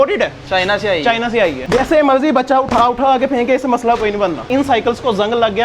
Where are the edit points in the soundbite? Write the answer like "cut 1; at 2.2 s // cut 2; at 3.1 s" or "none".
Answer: cut 1; at 1.6 s // cut 2; at 4.5 s